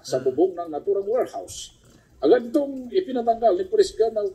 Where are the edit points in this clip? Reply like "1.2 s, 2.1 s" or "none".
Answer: 2.8 s

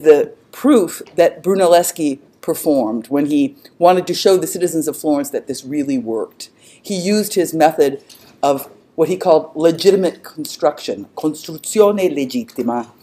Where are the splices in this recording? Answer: 1.9 s

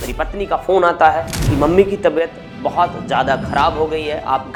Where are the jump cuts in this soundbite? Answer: none

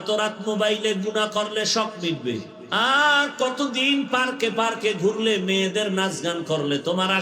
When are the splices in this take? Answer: 2.6 s

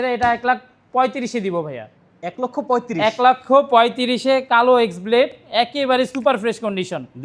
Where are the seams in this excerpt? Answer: none

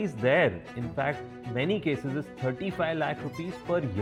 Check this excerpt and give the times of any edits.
none

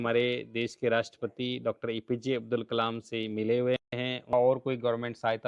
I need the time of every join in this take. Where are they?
4.3 s

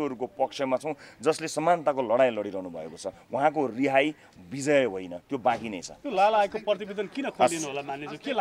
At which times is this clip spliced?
none

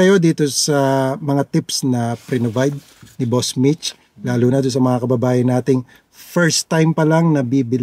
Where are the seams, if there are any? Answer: none

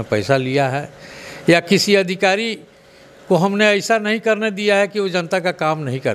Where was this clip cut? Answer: none

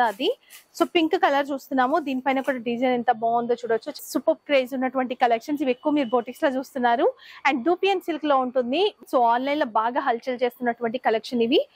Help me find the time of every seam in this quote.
4.0 s, 9.0 s

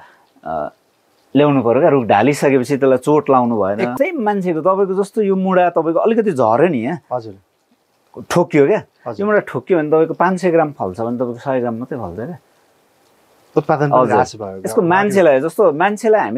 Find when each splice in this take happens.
3.9 s

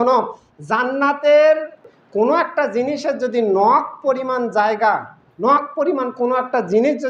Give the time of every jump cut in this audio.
1.8 s

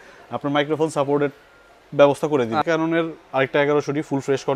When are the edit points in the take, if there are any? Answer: 2.6 s

